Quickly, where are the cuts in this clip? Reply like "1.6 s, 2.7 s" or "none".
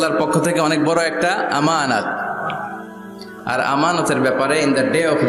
none